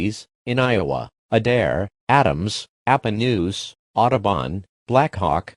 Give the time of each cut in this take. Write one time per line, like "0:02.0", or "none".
none

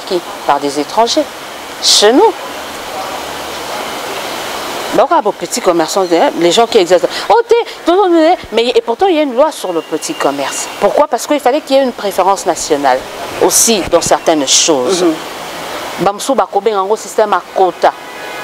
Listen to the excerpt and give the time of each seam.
none

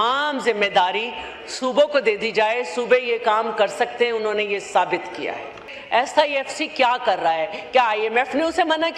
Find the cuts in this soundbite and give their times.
0:05.7

